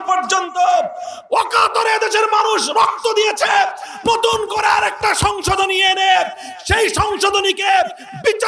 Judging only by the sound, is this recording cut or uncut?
uncut